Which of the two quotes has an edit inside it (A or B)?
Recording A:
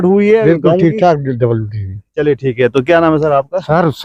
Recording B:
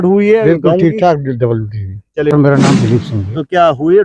B